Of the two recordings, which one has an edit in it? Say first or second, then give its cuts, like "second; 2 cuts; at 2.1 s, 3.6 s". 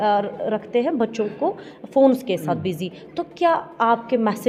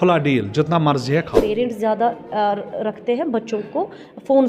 second; 1 cut; at 1.4 s